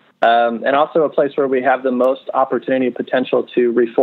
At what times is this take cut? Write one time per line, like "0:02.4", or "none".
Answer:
none

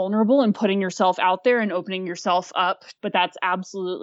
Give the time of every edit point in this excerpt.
0:02.9

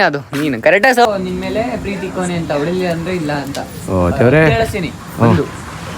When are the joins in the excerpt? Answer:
0:01.1

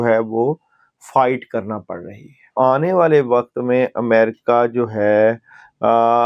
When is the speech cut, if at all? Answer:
0:02.5

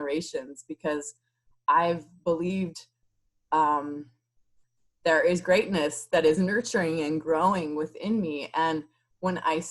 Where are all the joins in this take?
none

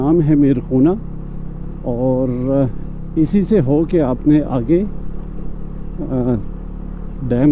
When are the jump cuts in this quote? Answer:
none

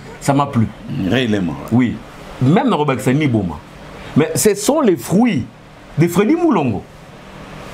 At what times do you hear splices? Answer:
none

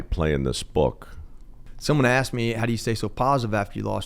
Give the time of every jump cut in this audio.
0:01.7

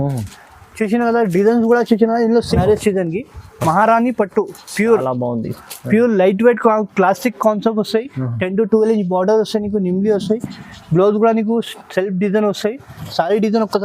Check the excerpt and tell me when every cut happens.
0:02.5

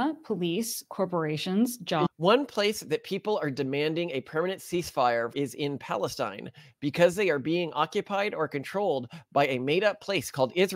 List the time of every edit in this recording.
0:02.1

